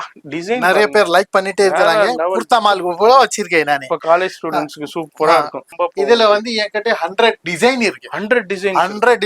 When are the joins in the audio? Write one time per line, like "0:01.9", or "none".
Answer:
0:05.6